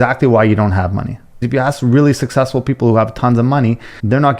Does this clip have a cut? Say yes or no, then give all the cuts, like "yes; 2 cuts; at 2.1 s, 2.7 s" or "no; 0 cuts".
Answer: yes; 1 cut; at 1.4 s